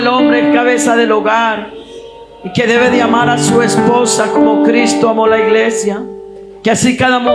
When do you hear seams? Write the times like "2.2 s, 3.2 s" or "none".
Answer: none